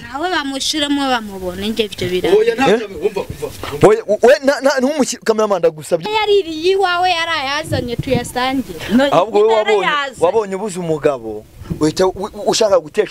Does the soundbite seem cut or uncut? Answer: cut